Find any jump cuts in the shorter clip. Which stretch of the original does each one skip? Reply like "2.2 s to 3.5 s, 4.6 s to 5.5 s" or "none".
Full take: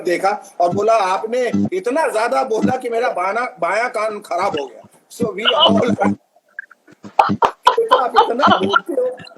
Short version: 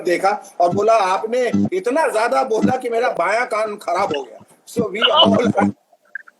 3.1 s to 3.6 s